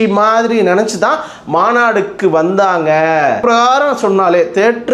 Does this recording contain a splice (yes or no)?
yes